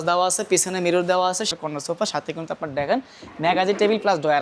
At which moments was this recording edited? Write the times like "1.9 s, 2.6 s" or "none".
1.5 s